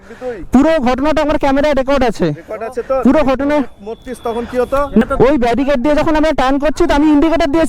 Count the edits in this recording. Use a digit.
1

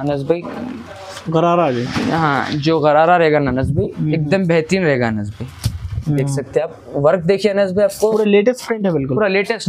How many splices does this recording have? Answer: 1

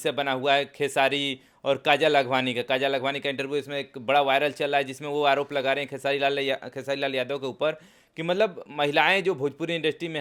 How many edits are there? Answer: 0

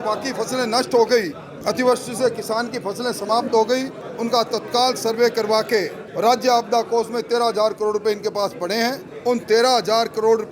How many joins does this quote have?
4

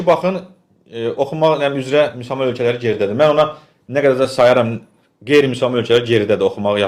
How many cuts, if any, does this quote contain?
0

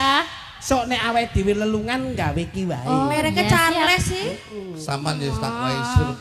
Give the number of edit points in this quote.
0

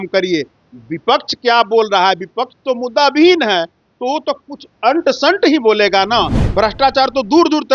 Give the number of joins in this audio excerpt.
1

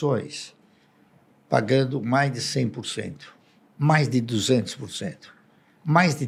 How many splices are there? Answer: 0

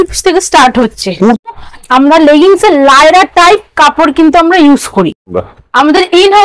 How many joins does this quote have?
2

